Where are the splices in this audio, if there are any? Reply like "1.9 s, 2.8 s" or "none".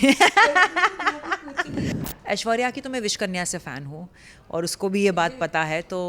1.9 s